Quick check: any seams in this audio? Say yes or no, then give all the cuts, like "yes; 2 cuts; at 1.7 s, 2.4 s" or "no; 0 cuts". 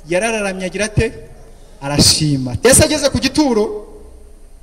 yes; 1 cut; at 2.6 s